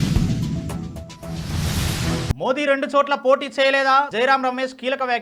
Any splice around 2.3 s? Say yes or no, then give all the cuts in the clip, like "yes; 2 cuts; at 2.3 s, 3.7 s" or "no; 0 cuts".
yes; 1 cut; at 2.3 s